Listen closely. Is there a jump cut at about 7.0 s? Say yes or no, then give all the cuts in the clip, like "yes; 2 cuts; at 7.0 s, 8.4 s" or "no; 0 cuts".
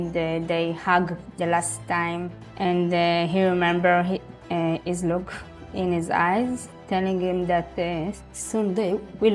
no; 1 cut; at 8.2 s